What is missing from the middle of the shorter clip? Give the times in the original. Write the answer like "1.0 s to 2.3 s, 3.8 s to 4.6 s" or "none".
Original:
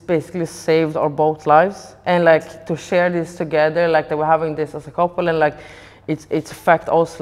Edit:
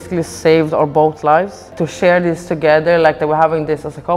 1.9 s to 2.6 s